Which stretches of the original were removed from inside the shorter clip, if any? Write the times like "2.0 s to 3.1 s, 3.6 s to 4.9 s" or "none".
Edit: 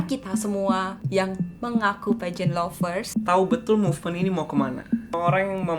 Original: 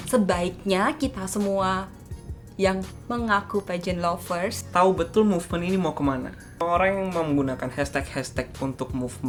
1.9 s to 2.5 s